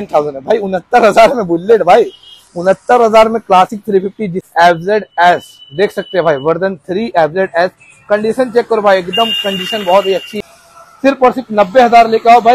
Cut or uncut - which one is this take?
cut